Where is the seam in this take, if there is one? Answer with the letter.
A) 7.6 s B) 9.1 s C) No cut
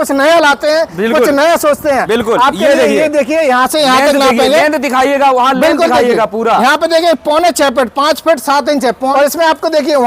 B